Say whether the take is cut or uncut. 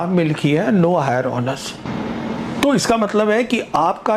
cut